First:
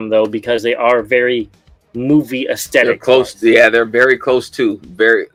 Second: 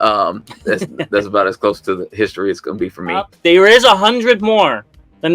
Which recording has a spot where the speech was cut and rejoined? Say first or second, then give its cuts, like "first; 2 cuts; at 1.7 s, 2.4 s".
second; 1 cut; at 3.3 s